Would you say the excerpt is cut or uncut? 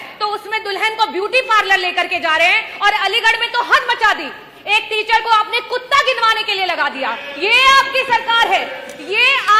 uncut